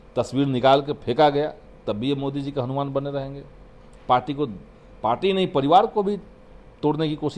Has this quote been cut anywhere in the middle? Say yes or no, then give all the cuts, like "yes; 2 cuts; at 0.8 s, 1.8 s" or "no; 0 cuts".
no; 0 cuts